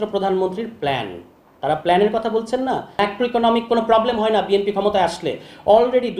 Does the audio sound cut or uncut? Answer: cut